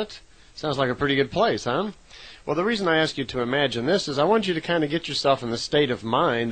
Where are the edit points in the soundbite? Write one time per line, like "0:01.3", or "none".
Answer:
0:02.7